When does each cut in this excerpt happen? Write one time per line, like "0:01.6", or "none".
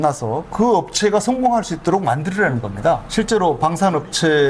0:03.1